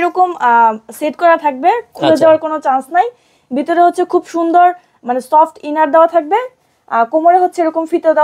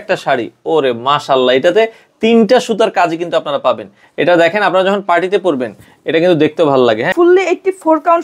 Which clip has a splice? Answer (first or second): second